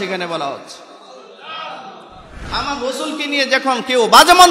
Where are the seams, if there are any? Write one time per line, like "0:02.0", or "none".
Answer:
0:02.5